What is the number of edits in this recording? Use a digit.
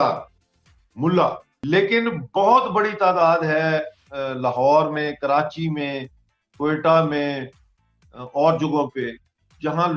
1